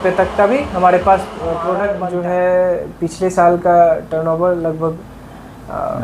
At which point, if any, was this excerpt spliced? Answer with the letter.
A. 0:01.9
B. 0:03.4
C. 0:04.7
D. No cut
A